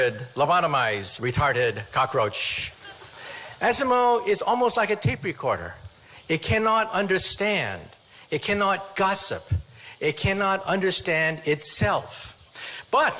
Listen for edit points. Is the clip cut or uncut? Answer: uncut